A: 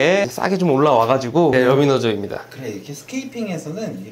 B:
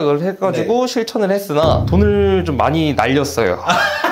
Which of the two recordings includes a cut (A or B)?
A